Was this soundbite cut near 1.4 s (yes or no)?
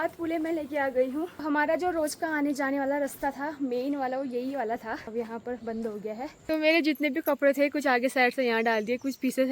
yes